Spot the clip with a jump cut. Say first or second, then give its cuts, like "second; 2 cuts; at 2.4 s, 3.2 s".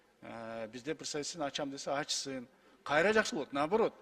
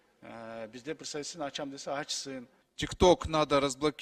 second; 1 cut; at 2.6 s